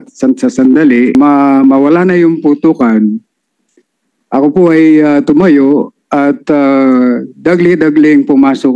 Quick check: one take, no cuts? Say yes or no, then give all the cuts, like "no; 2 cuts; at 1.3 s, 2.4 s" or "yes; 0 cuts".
no; 1 cut; at 1.1 s